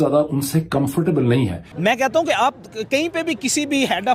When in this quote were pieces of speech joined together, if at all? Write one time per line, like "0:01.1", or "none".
0:01.6